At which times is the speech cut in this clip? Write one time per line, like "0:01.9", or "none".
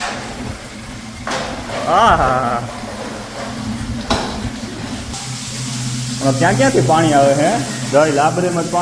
0:05.1